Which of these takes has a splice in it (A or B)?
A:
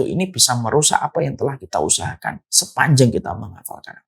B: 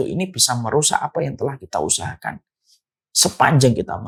A